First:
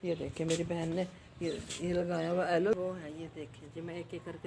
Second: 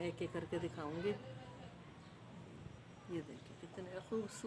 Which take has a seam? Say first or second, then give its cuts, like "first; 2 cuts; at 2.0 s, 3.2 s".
first; 1 cut; at 2.7 s